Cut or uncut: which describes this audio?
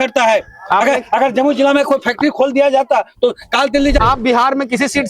cut